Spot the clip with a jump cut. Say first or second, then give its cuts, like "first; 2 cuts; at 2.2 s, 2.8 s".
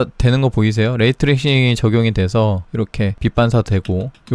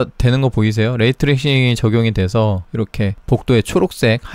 first; 1 cut; at 3.2 s